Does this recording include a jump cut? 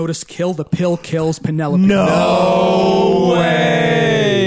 no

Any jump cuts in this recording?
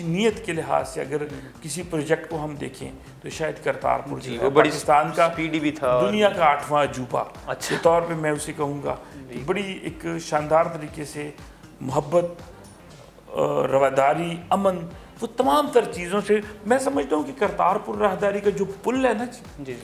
no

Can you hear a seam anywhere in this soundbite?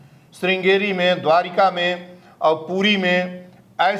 no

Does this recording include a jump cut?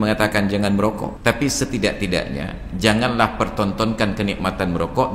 yes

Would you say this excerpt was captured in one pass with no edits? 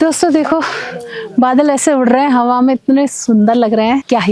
yes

